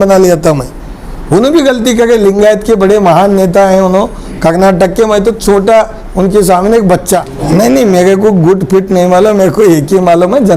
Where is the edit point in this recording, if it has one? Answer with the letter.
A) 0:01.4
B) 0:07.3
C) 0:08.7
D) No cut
B